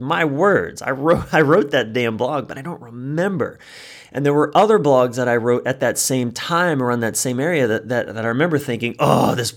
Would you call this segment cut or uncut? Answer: uncut